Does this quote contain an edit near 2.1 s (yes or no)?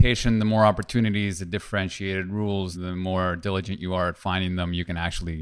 no